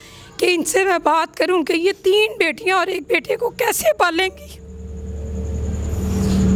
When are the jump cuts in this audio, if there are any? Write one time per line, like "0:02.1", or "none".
none

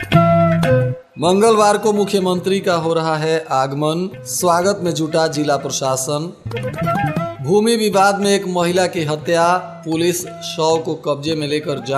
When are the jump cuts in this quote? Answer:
0:01.0

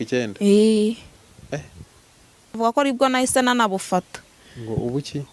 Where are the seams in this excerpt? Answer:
0:02.6

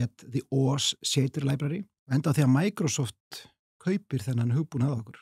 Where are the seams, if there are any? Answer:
0:01.9

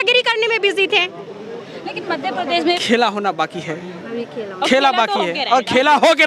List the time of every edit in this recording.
0:02.8

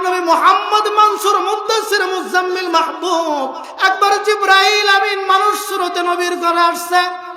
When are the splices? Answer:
0:03.6

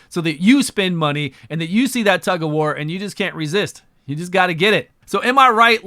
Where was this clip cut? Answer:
none

